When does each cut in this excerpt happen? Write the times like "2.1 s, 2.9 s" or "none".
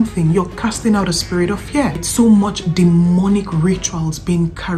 2.0 s

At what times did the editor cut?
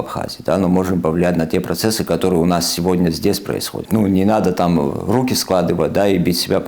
3.7 s

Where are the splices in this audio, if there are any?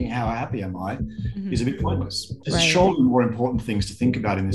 2.4 s

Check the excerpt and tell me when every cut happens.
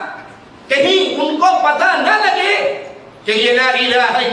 none

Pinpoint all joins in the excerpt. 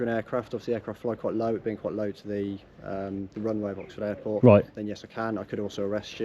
none

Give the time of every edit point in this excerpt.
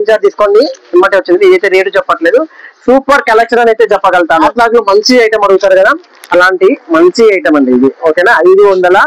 4.5 s

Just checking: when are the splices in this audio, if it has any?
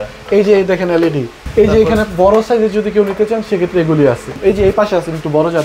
1.4 s, 4.3 s

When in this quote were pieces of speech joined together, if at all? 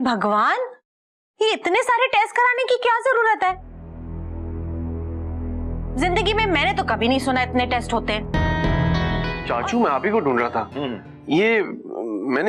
9.3 s

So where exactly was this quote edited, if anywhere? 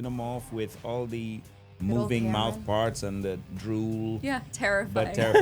4.2 s

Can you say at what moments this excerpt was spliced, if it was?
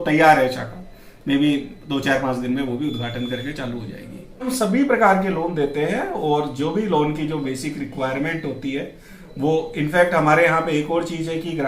none

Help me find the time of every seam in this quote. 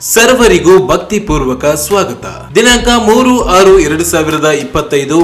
none

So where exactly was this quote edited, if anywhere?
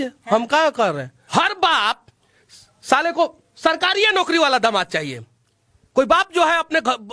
1.1 s

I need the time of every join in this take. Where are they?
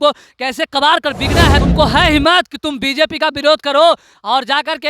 1.6 s

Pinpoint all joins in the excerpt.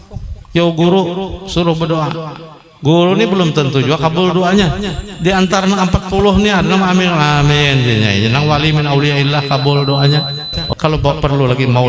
10.6 s

